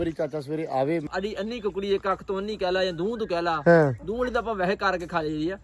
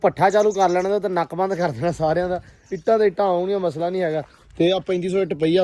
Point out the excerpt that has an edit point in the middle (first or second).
first